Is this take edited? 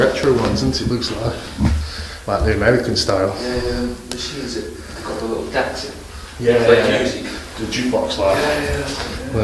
no; 0 cuts

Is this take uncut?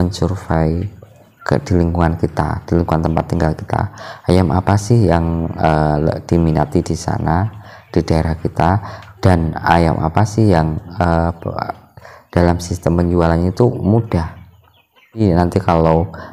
no; 1 cut; at 15.2 s

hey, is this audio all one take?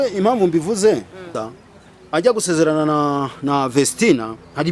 no; 1 cut; at 1.3 s

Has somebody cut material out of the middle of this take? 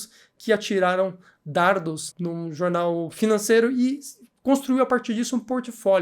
yes; 1 cut; at 2.1 s

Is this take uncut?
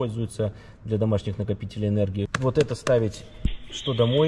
no; 1 cut; at 2.3 s

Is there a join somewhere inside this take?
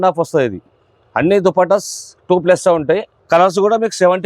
yes; 1 cut; at 3.1 s

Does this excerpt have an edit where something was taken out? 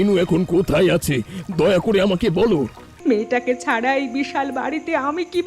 yes; 1 cut; at 2.8 s

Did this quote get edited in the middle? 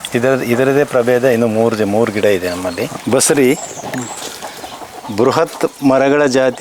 yes; 1 cut; at 3.0 s

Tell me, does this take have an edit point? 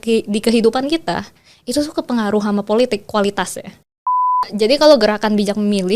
yes; 1 cut; at 4.4 s

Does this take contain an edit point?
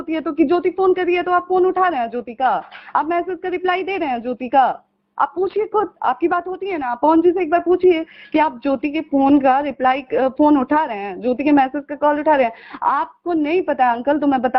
no; 0 cuts

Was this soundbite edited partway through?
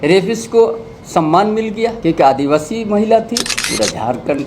yes; 2 cuts; at 2.0 s, 3.6 s

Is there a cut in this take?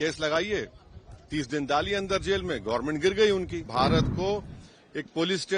yes; 1 cut; at 3.7 s

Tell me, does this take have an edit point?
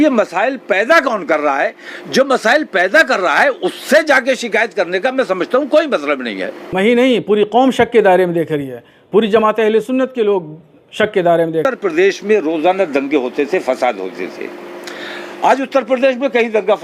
yes; 2 cuts; at 6.7 s, 11.6 s

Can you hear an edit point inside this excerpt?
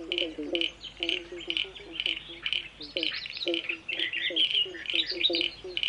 yes; 1 cut; at 4.0 s

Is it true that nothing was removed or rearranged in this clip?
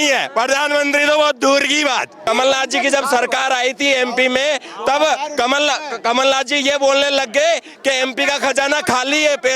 no; 1 cut; at 2.2 s

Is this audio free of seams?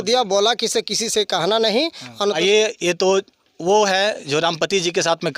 no; 1 cut; at 2.4 s

